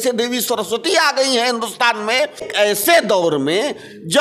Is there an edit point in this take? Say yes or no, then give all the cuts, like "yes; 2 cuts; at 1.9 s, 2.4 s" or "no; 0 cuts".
yes; 1 cut; at 2.4 s